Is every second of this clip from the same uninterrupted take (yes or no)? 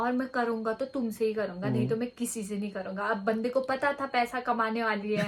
yes